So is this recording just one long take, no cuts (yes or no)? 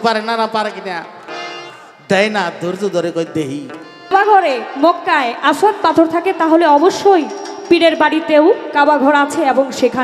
no